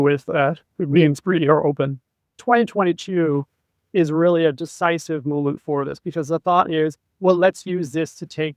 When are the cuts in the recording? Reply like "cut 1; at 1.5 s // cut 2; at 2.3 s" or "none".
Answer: cut 1; at 2.3 s